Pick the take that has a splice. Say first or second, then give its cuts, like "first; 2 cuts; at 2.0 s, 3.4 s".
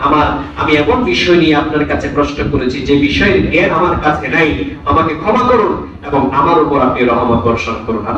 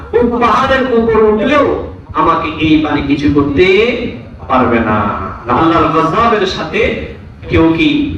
second; 1 cut; at 5.6 s